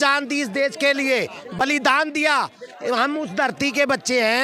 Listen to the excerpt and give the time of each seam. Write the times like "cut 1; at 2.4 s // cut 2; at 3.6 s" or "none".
none